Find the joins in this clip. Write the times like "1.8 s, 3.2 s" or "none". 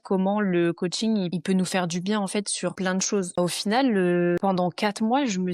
1.3 s, 2.9 s, 4.4 s